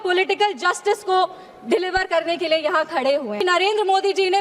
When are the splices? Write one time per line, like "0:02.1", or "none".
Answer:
0:03.4